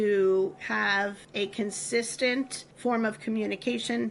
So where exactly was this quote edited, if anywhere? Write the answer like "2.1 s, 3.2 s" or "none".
1.2 s, 2.6 s